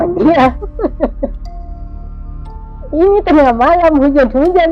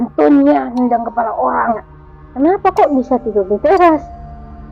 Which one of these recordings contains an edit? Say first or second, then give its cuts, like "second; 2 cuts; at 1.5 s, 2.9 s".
second; 1 cut; at 1.9 s